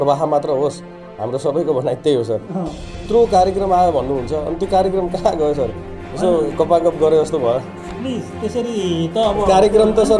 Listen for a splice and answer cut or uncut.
cut